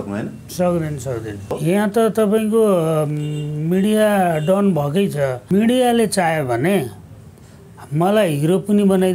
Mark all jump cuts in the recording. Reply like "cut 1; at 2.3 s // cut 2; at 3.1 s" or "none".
cut 1; at 1.5 s // cut 2; at 5.4 s

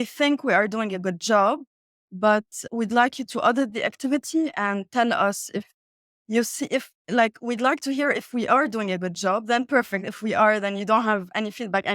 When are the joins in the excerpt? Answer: cut 1; at 2.6 s // cut 2; at 3.3 s

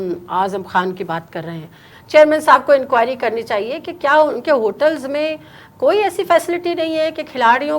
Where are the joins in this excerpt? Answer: cut 1; at 1.9 s

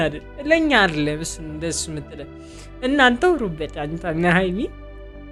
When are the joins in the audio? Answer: none

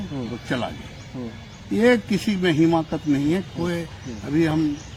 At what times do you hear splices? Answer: none

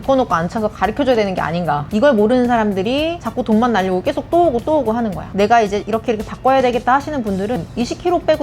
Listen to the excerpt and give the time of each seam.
cut 1; at 1.8 s // cut 2; at 3.2 s // cut 3; at 5.2 s // cut 4; at 7.6 s

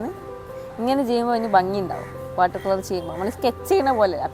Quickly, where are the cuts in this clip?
none

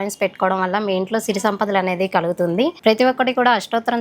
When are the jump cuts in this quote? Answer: cut 1; at 2.8 s

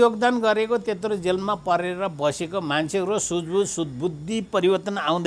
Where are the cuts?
none

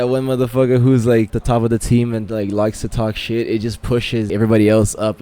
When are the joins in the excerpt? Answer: cut 1; at 1.4 s // cut 2; at 4.3 s

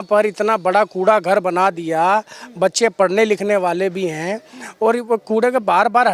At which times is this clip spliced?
none

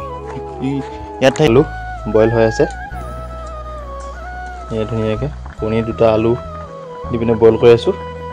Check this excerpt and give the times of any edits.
cut 1; at 1.5 s

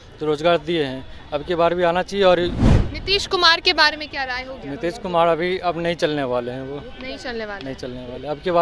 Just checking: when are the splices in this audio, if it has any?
cut 1; at 2.6 s

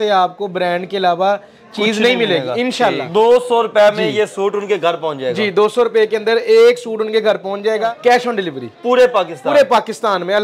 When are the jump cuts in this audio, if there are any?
cut 1; at 3.0 s // cut 2; at 7.8 s

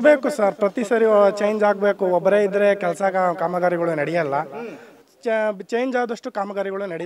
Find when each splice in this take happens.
none

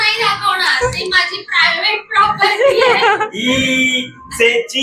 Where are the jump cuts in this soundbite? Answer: none

